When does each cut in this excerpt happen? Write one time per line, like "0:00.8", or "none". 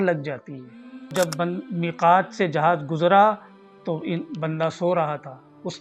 0:01.1